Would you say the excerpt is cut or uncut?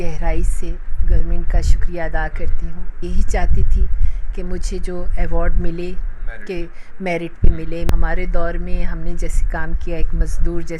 cut